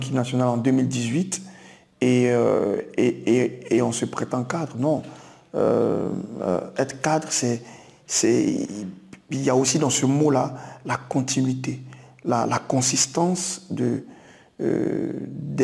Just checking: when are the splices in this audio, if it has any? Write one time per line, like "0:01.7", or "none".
none